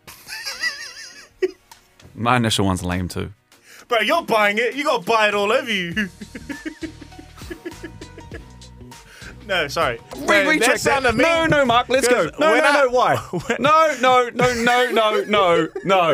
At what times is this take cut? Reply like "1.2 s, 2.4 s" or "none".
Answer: 10.2 s